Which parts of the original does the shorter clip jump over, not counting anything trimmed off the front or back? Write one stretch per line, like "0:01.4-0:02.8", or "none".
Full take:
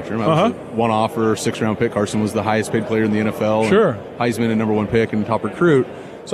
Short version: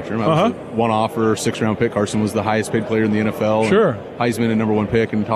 none